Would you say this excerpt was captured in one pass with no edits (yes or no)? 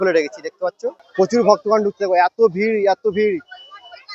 no